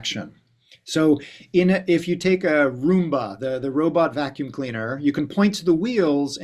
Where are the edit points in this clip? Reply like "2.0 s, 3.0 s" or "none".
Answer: none

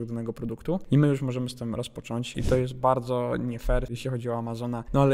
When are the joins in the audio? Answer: 0.8 s, 2.3 s

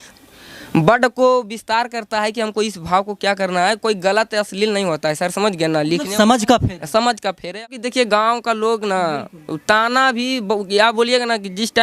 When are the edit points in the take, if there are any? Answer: 7.6 s

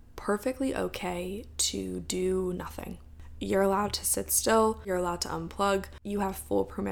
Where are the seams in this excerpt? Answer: 3.1 s, 4.9 s

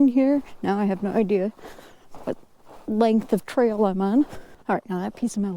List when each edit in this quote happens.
4.5 s

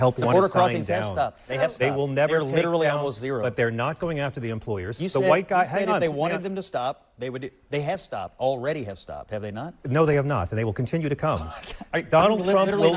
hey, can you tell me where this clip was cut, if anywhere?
none

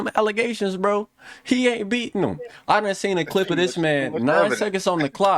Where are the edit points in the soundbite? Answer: none

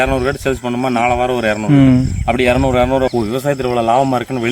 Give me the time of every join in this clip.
3.1 s

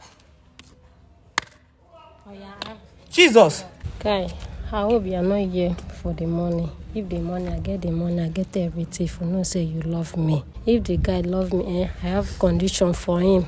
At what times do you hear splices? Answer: 3.9 s, 10.5 s

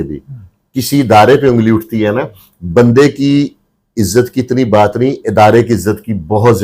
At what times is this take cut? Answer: none

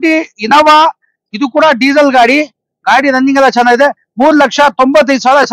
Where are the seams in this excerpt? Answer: none

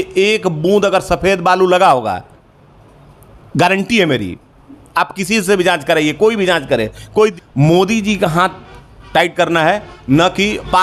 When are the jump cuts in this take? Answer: 7.4 s

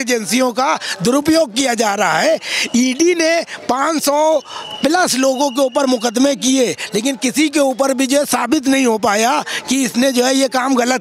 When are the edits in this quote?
none

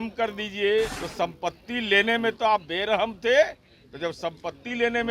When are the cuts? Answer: 1.0 s

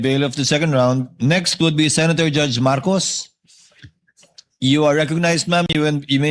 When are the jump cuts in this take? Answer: none

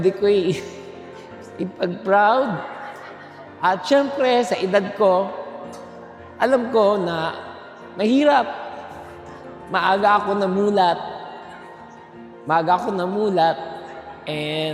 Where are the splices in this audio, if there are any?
none

